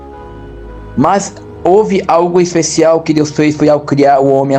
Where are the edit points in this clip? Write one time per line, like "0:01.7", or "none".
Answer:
0:00.9